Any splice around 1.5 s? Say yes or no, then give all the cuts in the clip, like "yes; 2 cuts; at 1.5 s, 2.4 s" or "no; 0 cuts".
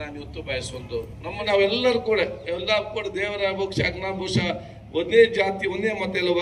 yes; 1 cut; at 1.5 s